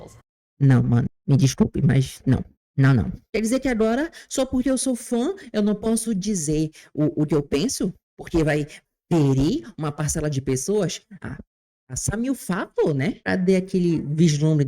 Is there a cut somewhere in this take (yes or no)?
yes